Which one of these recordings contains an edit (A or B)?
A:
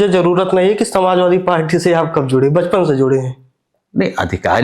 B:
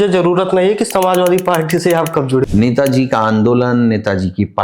B